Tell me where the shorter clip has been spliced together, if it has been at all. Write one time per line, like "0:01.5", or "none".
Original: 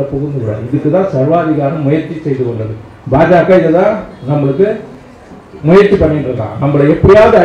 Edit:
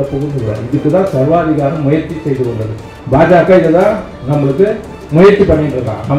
0:04.9

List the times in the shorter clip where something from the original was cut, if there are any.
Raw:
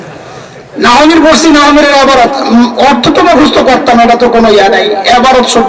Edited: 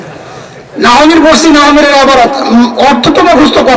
none

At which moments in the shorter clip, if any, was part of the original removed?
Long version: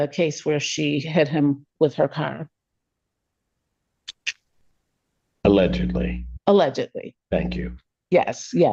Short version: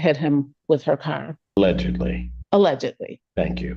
0:01.6

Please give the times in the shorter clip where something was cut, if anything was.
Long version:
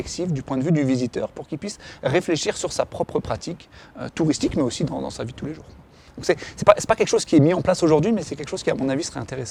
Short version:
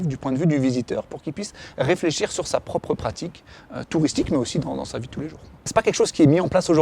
0:05.7

